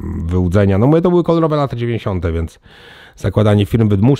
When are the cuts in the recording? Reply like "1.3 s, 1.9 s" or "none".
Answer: none